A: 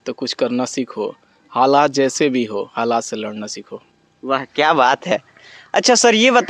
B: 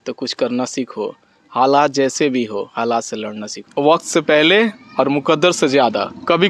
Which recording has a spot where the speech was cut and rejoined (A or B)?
B